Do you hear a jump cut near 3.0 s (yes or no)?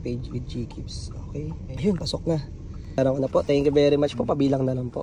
yes